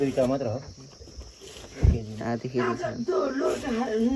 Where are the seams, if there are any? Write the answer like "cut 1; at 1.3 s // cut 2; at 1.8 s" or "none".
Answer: none

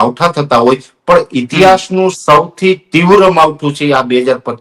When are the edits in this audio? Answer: none

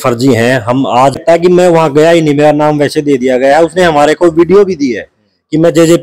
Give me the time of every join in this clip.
cut 1; at 1.2 s

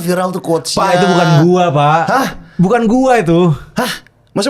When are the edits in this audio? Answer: none

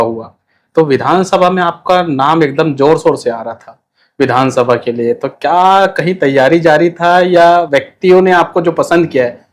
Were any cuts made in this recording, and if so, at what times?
none

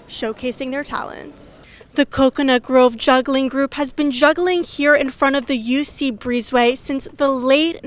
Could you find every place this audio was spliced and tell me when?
cut 1; at 1.5 s

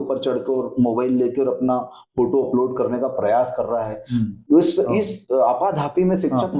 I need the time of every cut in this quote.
none

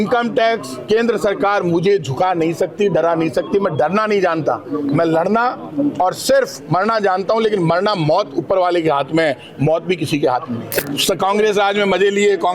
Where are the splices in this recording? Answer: cut 1; at 10.7 s

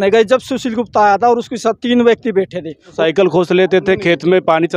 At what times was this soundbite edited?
cut 1; at 2.9 s

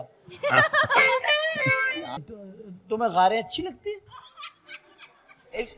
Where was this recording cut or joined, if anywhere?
cut 1; at 2.3 s

